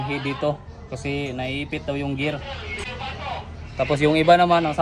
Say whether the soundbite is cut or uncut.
cut